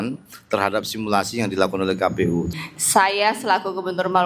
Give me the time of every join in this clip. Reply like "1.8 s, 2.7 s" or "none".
2.5 s